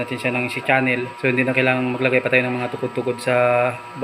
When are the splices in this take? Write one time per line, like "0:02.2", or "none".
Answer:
0:01.1